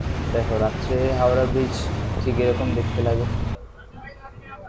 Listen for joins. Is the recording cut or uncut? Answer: cut